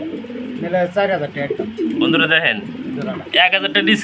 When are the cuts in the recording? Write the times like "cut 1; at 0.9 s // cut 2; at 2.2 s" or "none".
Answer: none